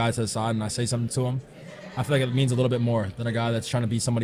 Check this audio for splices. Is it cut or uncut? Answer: uncut